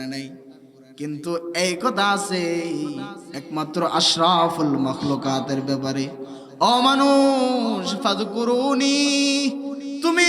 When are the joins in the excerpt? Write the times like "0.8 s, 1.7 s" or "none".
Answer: none